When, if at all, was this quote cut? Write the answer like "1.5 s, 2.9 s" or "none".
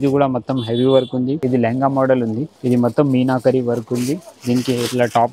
1.4 s, 2.5 s